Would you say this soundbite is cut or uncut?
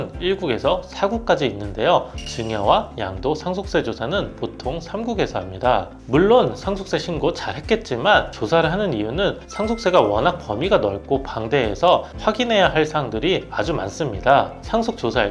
cut